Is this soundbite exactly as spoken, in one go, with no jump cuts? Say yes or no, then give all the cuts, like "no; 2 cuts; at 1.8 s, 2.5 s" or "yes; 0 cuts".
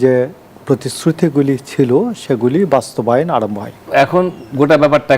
no; 1 cut; at 3.7 s